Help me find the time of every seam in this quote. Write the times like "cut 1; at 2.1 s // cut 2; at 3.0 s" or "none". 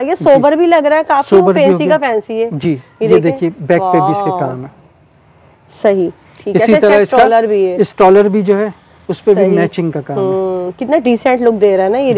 none